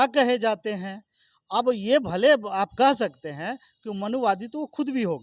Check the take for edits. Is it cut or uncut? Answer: uncut